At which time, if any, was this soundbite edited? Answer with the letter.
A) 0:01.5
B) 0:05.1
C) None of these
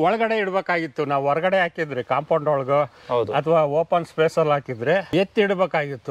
B